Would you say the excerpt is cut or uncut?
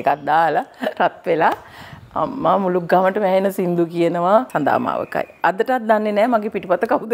cut